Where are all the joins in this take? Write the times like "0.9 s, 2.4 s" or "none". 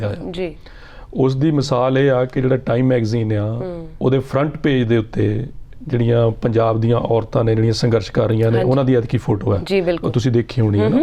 none